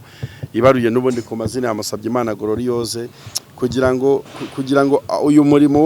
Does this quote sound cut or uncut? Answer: uncut